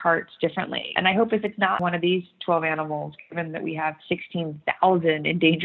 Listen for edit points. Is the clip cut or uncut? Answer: cut